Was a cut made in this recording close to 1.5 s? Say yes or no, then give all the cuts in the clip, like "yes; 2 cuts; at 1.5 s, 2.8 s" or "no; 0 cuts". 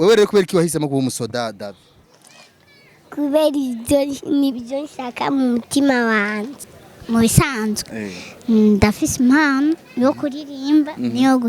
no; 1 cut; at 6.6 s